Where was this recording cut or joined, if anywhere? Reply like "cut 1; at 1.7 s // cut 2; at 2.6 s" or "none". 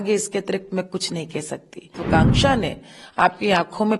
cut 1; at 2.0 s